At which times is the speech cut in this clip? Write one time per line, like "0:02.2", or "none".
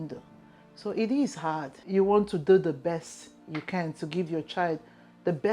0:01.7